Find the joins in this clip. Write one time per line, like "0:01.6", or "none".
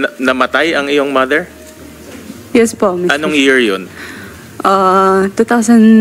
none

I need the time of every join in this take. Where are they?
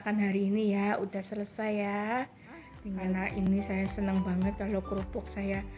0:03.4

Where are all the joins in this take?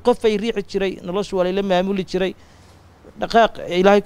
none

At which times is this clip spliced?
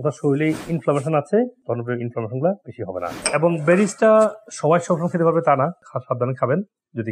0:01.6

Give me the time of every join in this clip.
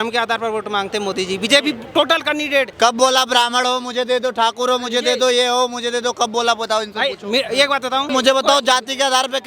0:02.7
0:08.1

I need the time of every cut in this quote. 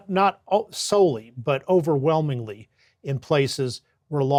none

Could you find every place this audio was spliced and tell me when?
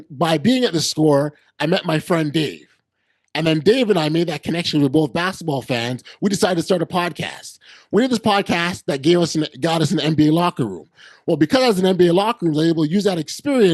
none

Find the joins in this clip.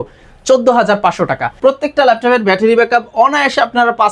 0:01.6

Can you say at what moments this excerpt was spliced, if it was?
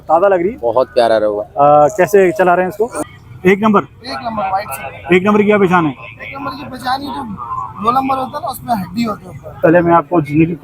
0:02.9
0:09.6

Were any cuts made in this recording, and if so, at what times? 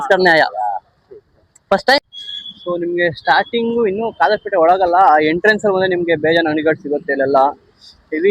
0:02.0

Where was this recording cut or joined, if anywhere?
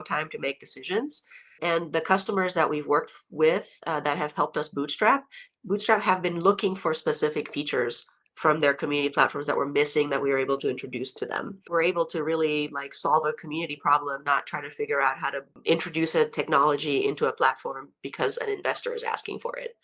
0:01.6
0:11.7
0:15.6

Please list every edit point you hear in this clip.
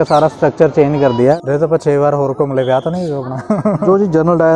0:01.4
0:03.8

